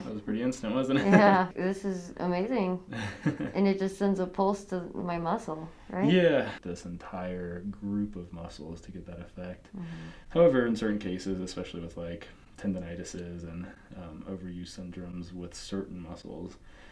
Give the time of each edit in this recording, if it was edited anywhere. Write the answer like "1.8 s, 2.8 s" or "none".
1.5 s, 6.5 s